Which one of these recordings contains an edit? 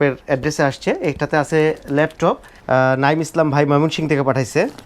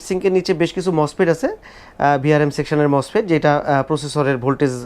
first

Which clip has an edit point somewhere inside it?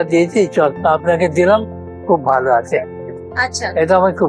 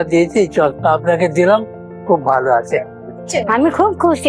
second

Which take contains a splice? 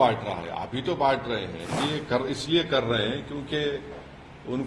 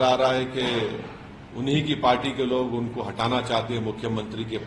first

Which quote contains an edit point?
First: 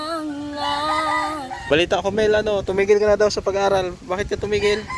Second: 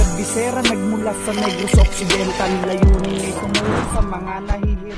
first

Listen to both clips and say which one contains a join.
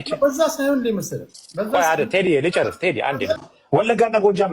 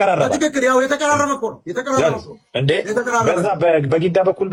first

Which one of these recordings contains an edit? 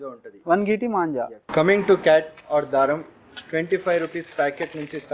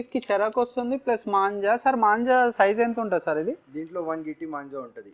first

